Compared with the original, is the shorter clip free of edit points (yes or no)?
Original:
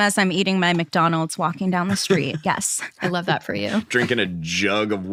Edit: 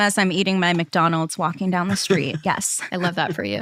yes